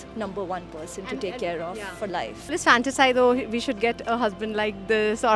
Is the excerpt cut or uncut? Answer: cut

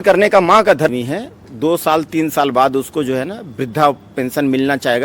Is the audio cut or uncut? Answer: cut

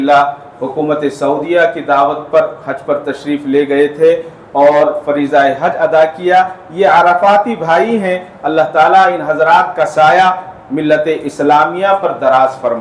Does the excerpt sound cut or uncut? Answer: uncut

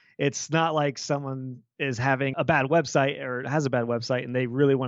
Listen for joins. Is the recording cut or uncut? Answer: cut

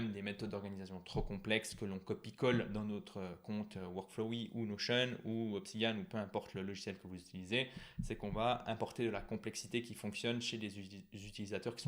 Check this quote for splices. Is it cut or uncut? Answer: uncut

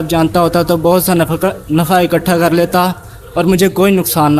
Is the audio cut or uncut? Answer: uncut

